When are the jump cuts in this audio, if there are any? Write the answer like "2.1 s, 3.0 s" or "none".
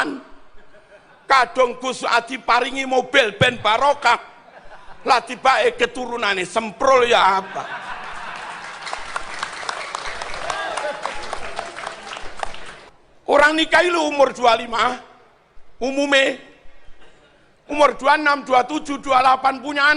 12.8 s